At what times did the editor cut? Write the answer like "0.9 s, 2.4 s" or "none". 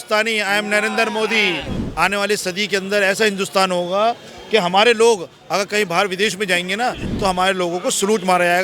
1.8 s